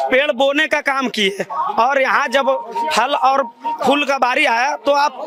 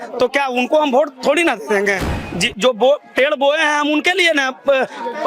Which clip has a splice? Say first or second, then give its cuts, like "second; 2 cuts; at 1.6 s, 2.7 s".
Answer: second; 1 cut; at 2.1 s